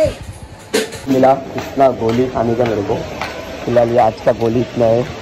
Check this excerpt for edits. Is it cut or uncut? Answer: cut